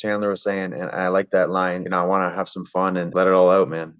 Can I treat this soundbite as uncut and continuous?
no; 2 cuts; at 1.8 s, 3.1 s

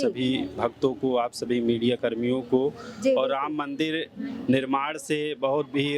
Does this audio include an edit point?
no; 0 cuts

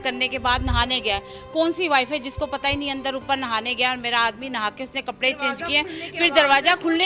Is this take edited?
no; 0 cuts

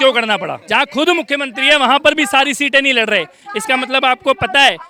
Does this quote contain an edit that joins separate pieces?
no; 0 cuts

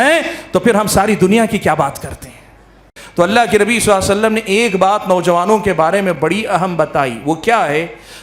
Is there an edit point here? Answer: yes; 1 cut; at 3.0 s

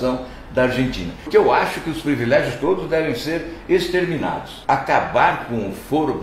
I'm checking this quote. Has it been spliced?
yes; 2 cuts; at 1.2 s, 4.5 s

